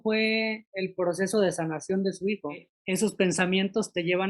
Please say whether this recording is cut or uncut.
cut